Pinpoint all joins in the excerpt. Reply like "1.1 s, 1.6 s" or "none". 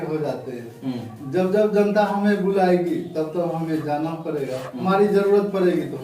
4.7 s